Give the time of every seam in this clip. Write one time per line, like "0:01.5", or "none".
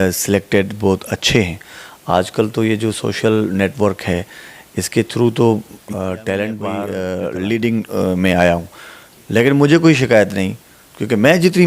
0:06.9